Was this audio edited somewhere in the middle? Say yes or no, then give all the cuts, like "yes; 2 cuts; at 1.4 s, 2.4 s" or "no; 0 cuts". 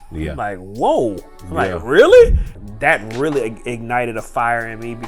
yes; 1 cut; at 2.6 s